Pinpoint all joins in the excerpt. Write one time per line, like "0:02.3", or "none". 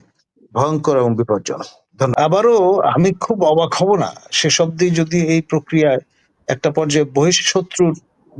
0:02.1